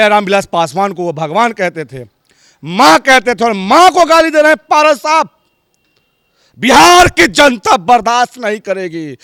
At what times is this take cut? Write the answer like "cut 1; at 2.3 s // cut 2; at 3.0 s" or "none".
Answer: none